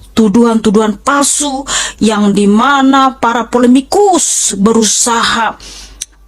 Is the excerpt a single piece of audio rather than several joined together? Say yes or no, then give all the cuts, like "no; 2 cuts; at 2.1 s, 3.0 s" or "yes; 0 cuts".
yes; 0 cuts